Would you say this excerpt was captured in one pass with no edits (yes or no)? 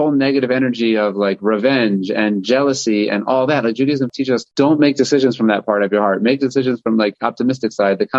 yes